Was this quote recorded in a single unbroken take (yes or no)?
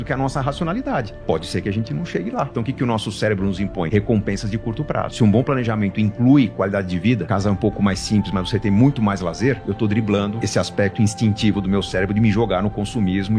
no